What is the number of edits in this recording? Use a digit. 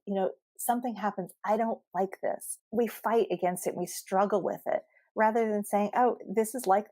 1